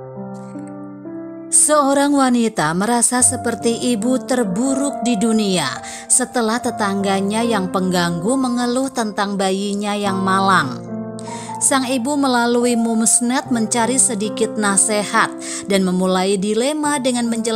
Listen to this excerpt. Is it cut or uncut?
cut